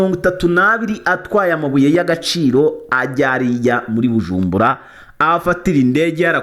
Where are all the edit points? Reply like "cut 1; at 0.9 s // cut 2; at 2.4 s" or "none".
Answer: none